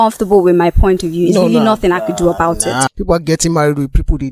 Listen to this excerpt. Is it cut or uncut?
cut